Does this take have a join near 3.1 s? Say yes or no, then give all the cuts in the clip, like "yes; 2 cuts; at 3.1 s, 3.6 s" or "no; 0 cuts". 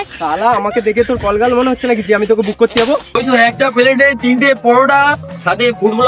yes; 1 cut; at 3.1 s